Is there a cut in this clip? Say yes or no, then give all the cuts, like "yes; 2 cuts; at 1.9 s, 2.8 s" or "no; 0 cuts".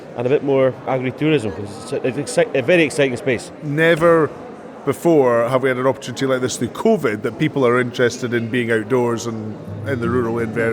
yes; 2 cuts; at 0.9 s, 3.6 s